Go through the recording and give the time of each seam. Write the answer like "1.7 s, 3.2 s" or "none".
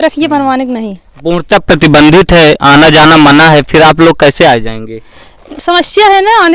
none

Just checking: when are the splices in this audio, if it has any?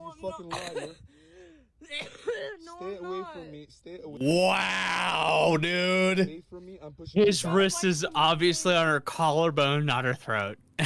none

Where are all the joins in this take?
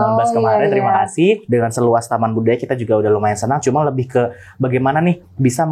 1.4 s

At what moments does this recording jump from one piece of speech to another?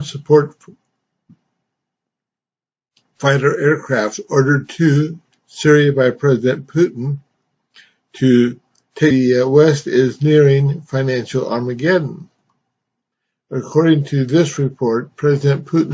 none

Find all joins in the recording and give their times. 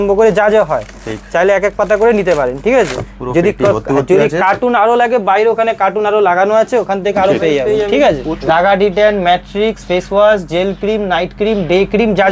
8.3 s

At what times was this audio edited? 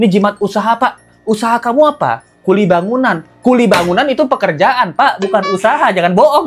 none

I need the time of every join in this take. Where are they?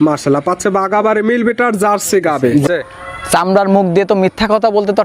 2.6 s

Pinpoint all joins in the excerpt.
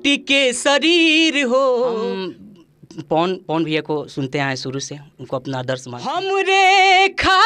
2.0 s, 6.2 s

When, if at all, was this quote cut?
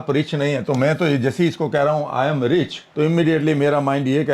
2.8 s

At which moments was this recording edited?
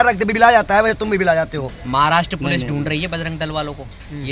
1.6 s

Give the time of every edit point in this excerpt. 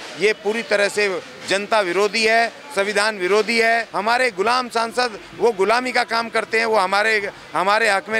3.9 s

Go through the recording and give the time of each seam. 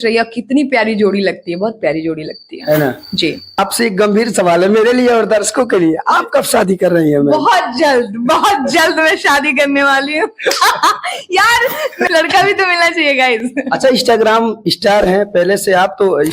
3.6 s, 12.1 s

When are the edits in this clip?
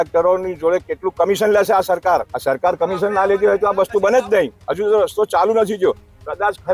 2.3 s, 4.6 s

